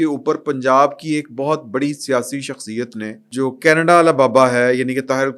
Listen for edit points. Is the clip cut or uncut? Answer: cut